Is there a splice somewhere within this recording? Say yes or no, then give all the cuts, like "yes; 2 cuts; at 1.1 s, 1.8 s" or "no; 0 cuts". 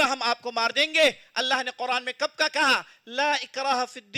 no; 0 cuts